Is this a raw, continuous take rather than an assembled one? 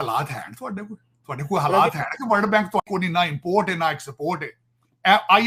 yes; 0 cuts

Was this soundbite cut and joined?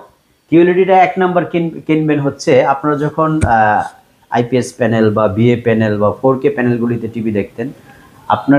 no; 0 cuts

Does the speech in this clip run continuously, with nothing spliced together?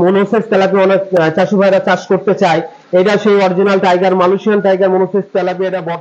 yes; 0 cuts

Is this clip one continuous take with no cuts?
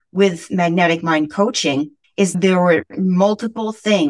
no; 1 cut; at 2.3 s

